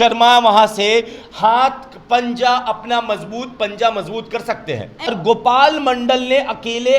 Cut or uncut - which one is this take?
cut